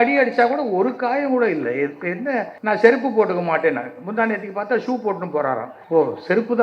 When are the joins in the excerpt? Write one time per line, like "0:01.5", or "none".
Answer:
0:02.5
0:05.7